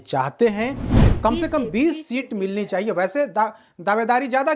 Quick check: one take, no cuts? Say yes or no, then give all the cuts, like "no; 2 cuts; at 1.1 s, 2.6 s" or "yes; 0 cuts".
no; 1 cut; at 0.9 s